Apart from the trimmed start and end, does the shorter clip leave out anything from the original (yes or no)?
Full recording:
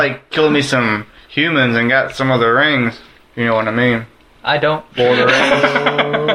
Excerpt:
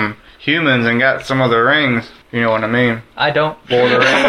yes